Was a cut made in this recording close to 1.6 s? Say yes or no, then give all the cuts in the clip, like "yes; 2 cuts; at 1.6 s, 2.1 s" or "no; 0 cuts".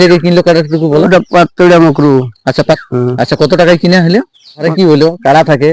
no; 2 cuts; at 2.8 s, 4.7 s